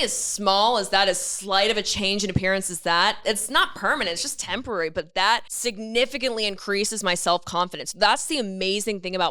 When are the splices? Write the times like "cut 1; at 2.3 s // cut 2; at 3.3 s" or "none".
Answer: cut 1; at 5.5 s